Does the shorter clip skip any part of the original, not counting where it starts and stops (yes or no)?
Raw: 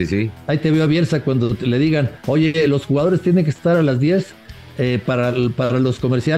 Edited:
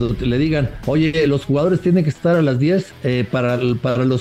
yes